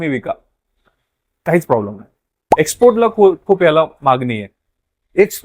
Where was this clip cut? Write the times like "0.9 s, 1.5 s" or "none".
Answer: 2.4 s